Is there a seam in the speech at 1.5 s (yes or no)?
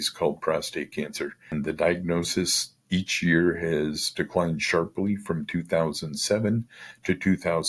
yes